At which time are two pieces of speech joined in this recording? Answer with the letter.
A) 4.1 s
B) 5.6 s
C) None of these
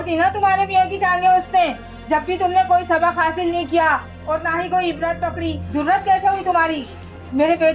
B